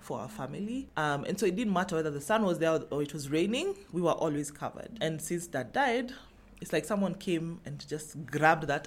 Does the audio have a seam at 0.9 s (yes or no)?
no